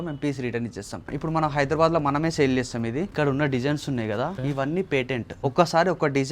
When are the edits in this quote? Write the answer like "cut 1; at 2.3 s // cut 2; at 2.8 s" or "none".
cut 1; at 1.1 s // cut 2; at 3.1 s // cut 3; at 4.4 s // cut 4; at 5.3 s